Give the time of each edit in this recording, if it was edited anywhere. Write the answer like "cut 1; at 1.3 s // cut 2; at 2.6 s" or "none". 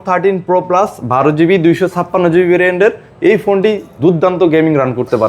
none